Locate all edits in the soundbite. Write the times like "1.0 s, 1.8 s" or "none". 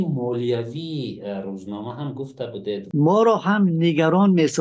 2.8 s